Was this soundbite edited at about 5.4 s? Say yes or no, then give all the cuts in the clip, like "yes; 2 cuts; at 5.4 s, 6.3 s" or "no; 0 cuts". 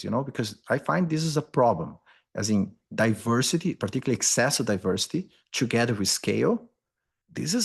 yes; 1 cut; at 5.4 s